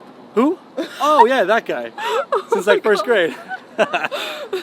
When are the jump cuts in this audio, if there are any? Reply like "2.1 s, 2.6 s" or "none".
none